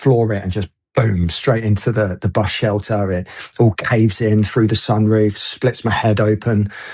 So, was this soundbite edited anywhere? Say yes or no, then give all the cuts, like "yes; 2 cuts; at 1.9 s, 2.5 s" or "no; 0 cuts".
no; 0 cuts